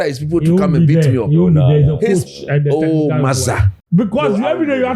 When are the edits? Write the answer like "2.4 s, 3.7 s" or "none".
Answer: 3.7 s